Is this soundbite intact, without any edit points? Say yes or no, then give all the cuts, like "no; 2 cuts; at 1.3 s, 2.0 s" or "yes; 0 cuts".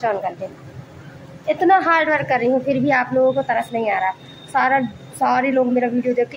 yes; 0 cuts